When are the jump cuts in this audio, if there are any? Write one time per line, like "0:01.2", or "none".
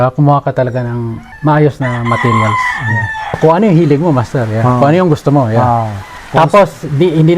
0:01.2
0:03.3